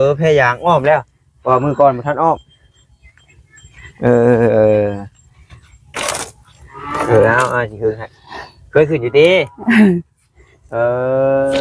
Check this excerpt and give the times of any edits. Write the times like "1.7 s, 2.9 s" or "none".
none